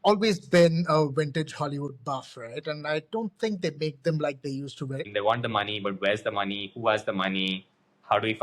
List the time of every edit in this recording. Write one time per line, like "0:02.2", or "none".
0:05.1